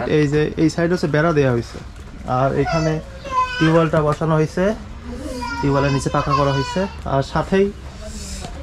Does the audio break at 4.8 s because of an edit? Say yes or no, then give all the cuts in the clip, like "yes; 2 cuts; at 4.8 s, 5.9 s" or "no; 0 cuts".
no; 0 cuts